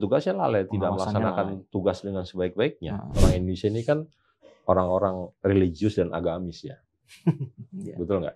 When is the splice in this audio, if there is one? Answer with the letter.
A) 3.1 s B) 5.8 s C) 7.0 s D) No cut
A